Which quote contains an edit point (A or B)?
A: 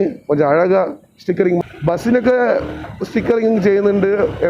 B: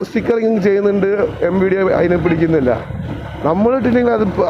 A